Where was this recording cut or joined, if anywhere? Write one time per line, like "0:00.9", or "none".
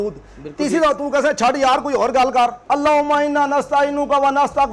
0:02.6